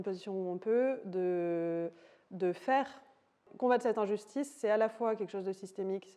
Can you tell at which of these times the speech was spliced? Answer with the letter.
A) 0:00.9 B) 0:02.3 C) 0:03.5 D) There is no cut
C